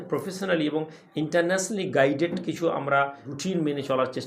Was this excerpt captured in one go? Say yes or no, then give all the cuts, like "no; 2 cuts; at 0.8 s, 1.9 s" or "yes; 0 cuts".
no; 1 cut; at 3.3 s